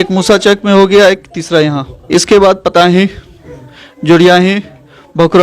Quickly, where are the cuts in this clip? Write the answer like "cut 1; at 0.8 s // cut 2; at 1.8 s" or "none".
cut 1; at 1.9 s